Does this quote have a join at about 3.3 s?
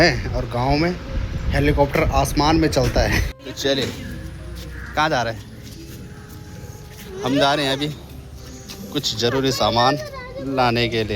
yes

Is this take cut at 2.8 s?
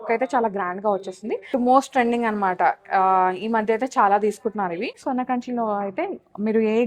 no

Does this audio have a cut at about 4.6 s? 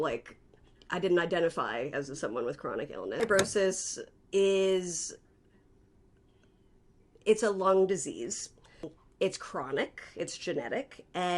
no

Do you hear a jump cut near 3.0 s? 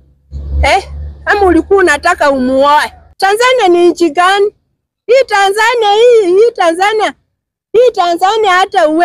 yes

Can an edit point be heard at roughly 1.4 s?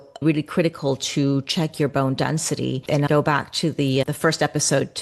no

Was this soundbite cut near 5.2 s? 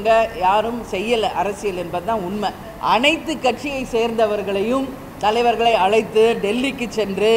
no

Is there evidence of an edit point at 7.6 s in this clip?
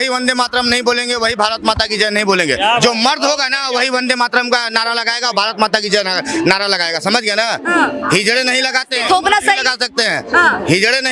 no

